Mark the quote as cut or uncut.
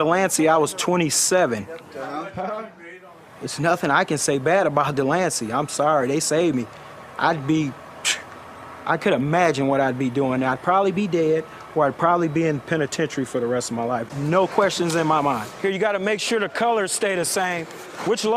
cut